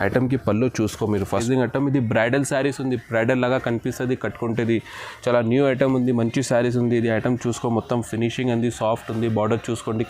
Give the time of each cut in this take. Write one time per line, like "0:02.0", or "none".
0:01.4